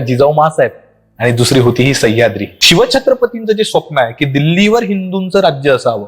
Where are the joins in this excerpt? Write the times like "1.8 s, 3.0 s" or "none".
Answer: 2.5 s